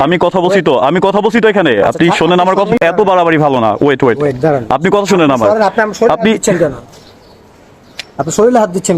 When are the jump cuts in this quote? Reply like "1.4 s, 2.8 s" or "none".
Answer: 2.8 s